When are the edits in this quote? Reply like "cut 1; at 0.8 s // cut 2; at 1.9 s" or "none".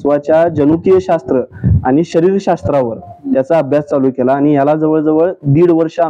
none